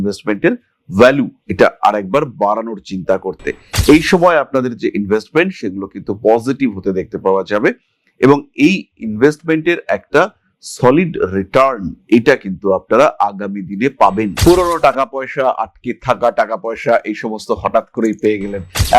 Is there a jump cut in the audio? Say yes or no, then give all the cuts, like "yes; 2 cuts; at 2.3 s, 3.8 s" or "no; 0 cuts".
yes; 1 cut; at 14.4 s